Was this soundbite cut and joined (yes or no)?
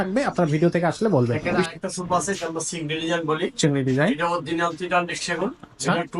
yes